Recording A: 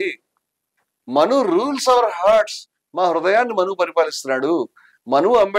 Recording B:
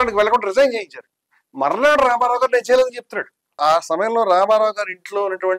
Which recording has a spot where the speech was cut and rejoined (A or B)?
B